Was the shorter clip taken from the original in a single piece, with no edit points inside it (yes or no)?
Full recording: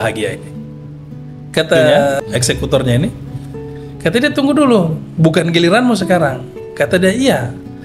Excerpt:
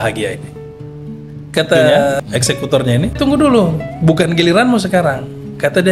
no